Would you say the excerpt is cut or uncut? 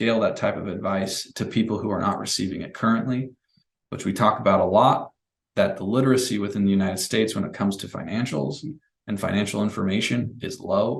uncut